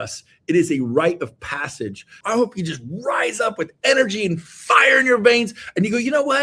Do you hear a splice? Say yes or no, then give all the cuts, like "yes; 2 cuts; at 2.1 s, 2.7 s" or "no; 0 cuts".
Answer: yes; 1 cut; at 2.1 s